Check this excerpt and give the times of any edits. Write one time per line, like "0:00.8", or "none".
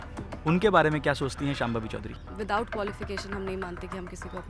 0:02.2